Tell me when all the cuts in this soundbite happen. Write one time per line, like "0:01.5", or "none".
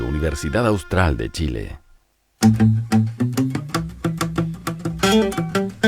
0:01.8